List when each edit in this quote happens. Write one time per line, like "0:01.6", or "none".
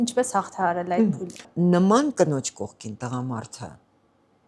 0:01.5